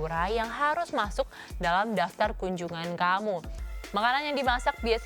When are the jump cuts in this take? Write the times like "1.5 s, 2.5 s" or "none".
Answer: 3.6 s